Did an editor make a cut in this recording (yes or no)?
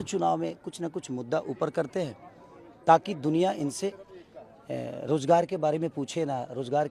no